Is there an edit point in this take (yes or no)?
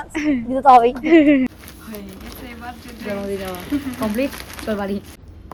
no